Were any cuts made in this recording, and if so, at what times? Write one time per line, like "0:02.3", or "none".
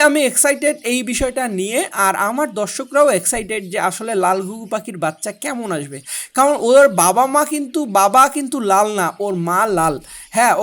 none